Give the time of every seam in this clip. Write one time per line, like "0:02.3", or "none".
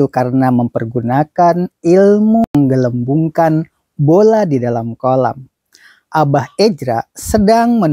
0:02.5